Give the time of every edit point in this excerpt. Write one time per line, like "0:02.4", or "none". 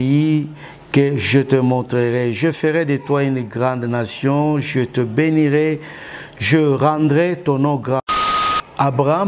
0:08.2